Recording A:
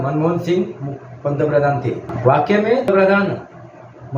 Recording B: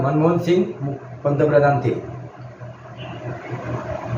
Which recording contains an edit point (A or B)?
A